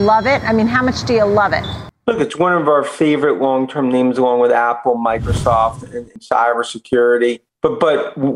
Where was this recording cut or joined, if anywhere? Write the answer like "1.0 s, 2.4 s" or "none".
none